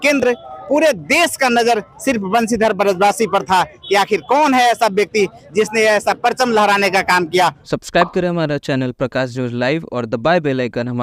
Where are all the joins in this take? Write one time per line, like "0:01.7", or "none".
0:07.6